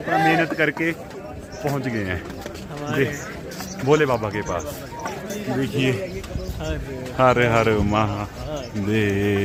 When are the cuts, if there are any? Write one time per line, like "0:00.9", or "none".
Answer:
none